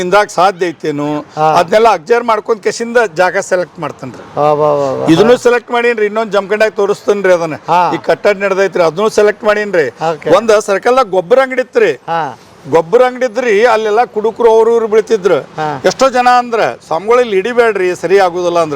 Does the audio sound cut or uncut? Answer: uncut